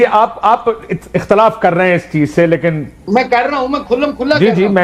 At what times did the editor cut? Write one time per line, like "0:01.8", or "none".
none